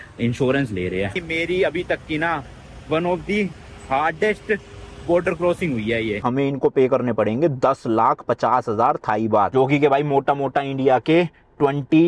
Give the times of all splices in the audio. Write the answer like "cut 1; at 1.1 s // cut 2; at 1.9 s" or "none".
cut 1; at 1.1 s // cut 2; at 6.2 s